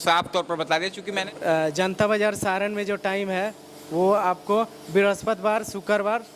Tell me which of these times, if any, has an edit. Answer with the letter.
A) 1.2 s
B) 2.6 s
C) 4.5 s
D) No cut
A